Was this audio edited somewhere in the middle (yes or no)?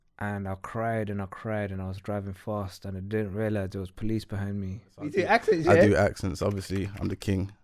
yes